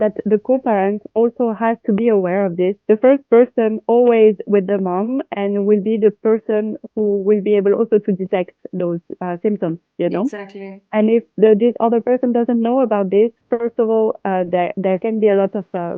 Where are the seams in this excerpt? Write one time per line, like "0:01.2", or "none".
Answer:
0:02.8